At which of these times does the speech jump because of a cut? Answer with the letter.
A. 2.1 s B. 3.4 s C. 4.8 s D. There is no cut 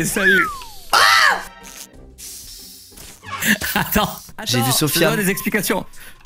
D